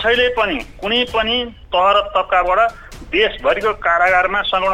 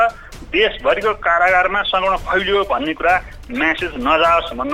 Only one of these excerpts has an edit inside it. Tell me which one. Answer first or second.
first